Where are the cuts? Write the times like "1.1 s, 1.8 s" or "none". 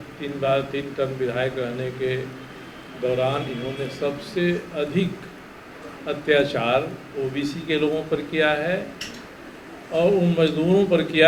none